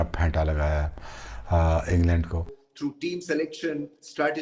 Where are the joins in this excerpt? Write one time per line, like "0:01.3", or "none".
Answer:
0:02.6